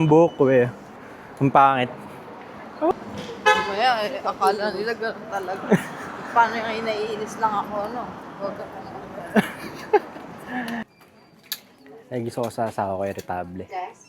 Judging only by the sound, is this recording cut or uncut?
cut